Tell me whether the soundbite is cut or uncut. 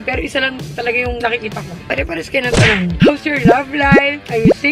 cut